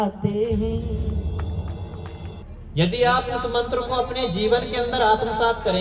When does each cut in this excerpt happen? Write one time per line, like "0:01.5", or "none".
0:02.4